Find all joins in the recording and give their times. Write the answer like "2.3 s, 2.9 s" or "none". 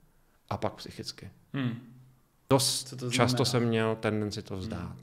2.4 s